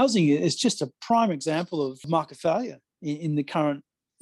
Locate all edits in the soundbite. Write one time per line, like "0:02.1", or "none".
0:02.0
0:02.8